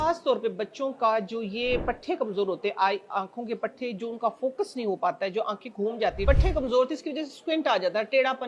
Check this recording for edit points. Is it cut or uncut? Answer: cut